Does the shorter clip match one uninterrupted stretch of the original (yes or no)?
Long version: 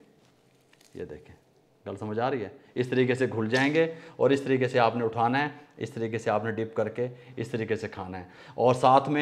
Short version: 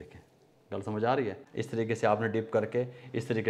no